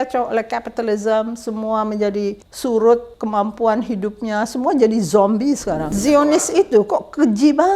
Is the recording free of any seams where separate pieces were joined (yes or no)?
no